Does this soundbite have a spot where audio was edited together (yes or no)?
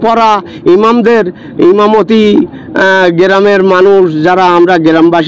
no